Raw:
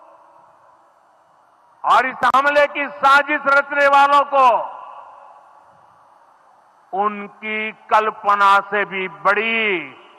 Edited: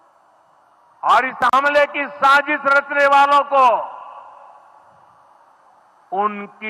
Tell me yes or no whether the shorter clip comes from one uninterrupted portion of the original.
yes